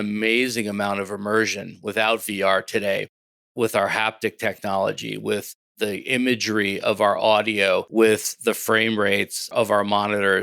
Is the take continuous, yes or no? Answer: no